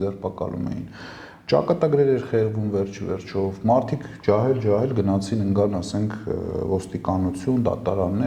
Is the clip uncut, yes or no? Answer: yes